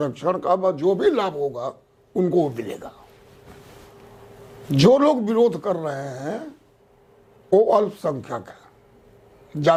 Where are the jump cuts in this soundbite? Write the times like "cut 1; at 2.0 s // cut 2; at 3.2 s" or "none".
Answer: none